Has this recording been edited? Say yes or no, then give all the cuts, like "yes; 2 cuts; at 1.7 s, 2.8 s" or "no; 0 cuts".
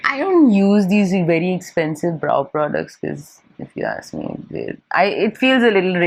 no; 0 cuts